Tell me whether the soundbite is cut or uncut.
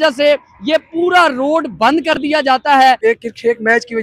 cut